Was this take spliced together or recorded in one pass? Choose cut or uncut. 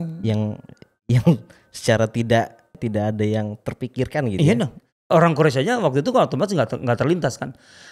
cut